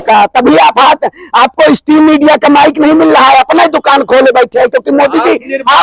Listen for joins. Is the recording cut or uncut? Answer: uncut